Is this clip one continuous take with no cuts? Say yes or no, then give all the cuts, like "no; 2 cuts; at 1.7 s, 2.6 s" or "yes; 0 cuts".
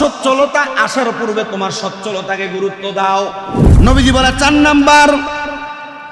no; 1 cut; at 3.6 s